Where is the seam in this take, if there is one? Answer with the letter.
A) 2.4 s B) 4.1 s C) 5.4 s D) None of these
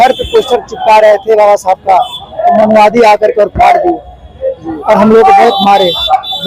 D